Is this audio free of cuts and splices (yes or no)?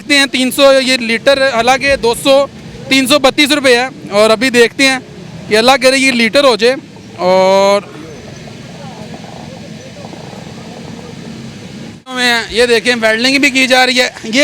no